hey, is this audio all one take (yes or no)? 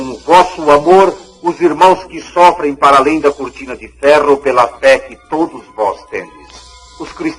yes